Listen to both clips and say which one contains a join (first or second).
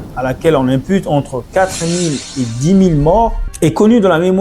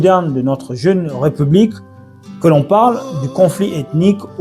first